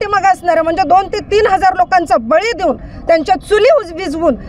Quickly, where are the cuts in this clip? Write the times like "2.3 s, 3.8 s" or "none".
none